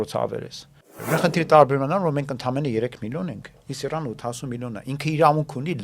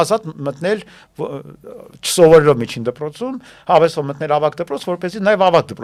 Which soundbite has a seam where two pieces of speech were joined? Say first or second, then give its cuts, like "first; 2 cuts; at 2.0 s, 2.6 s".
first; 1 cut; at 0.9 s